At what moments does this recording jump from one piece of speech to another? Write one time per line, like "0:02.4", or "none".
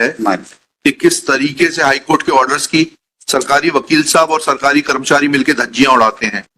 none

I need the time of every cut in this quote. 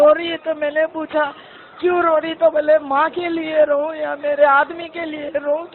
0:03.1

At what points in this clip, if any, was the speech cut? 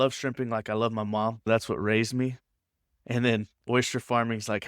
0:01.5

